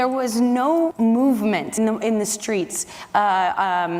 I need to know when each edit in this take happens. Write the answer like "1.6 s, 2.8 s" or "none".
0.9 s, 1.7 s